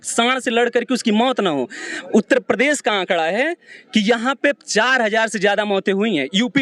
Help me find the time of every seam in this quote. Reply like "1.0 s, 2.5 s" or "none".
none